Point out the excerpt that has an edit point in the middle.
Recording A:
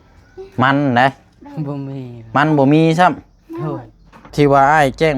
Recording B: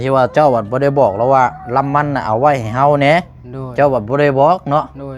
A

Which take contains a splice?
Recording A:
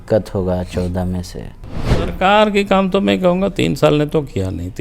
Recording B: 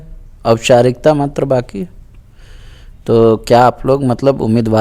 A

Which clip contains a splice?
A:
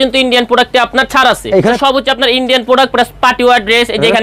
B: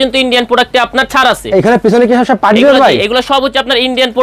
A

